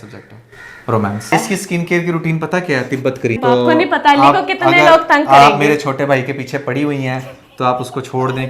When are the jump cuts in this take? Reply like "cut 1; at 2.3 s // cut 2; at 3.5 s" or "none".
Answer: cut 1; at 1.3 s // cut 2; at 3.4 s

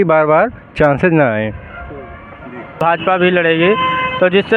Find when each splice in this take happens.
cut 1; at 2.8 s

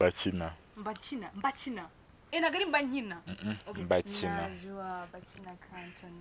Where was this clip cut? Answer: none

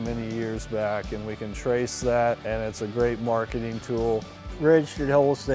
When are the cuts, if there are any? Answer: cut 1; at 2.4 s // cut 2; at 4.3 s

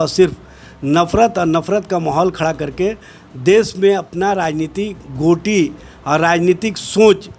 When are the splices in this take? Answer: none

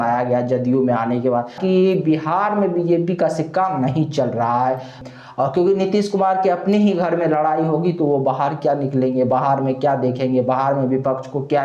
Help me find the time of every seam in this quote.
cut 1; at 1.6 s // cut 2; at 5.0 s

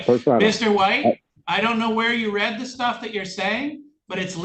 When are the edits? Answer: cut 1; at 1.3 s

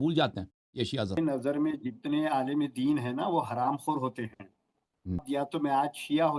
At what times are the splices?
cut 1; at 1.2 s // cut 2; at 5.2 s

